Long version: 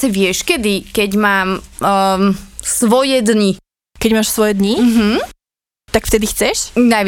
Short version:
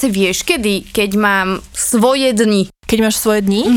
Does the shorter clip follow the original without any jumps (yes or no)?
no